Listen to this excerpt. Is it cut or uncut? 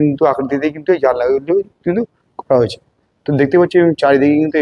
uncut